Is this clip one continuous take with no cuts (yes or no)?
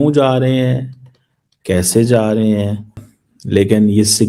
no